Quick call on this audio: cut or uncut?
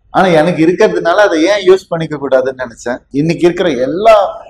cut